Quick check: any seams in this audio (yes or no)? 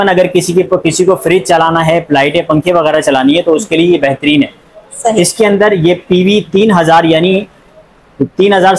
no